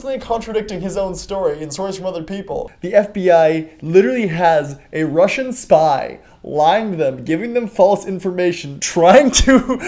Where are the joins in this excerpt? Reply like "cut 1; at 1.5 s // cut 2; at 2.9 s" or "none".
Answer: cut 1; at 2.7 s